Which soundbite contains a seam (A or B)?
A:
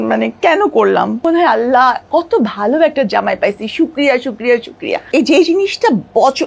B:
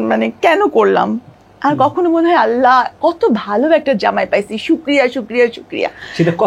A